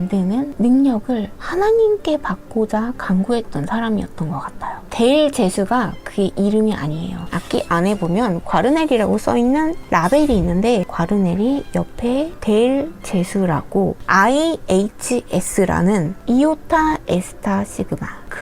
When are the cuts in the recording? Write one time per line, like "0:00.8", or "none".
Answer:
0:04.8
0:07.3
0:14.0
0:16.2